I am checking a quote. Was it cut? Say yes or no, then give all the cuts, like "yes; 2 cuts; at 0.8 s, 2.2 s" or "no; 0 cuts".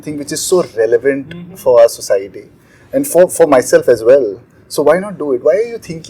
no; 0 cuts